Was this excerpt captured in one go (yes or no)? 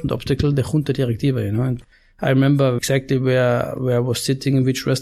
no